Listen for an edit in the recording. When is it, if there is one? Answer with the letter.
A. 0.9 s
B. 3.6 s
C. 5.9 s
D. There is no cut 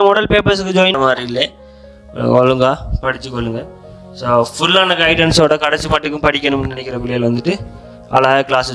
A